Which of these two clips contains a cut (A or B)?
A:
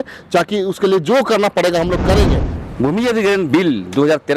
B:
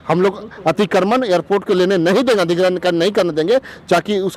A